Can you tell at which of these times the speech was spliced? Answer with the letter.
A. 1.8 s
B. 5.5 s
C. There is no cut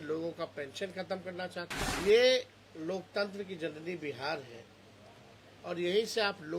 A